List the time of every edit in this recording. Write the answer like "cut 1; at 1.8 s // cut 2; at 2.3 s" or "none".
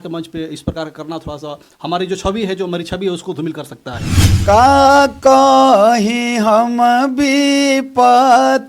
cut 1; at 4.2 s